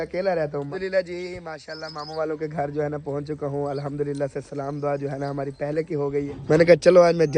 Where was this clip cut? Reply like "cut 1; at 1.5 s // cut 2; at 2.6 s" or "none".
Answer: cut 1; at 0.7 s // cut 2; at 6.3 s